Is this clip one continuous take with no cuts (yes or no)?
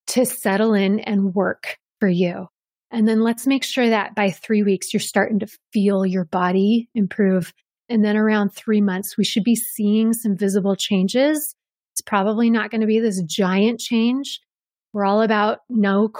yes